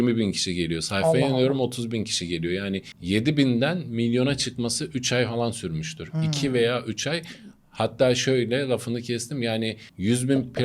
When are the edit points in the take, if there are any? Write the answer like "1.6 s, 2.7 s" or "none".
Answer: none